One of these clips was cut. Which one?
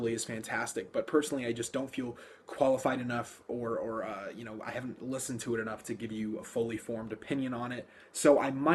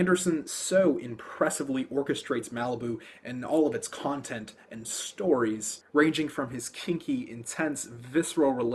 first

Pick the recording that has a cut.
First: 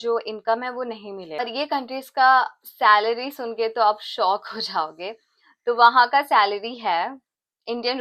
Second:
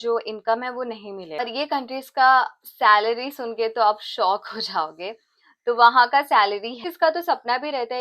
second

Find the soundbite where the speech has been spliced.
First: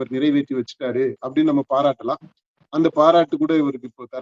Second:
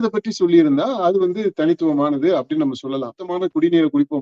second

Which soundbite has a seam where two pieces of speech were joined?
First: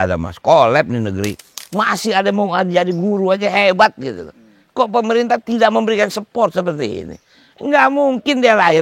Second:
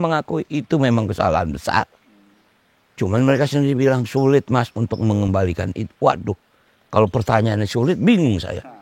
first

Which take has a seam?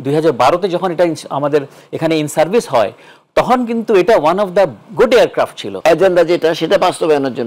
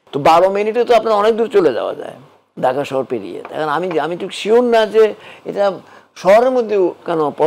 first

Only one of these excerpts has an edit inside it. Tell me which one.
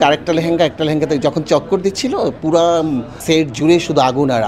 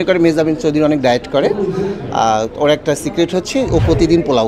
first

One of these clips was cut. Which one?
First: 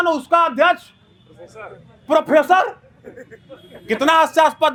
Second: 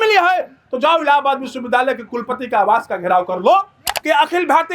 second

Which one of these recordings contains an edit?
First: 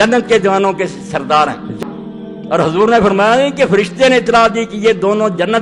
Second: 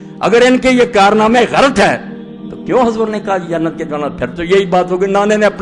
first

